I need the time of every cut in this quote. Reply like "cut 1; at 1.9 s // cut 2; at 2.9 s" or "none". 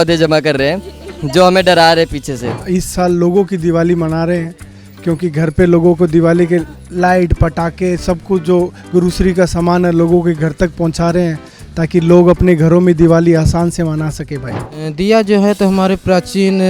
cut 1; at 2.6 s // cut 2; at 14.6 s